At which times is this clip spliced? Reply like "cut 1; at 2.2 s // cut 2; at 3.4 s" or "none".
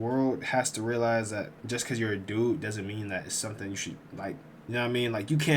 cut 1; at 4.5 s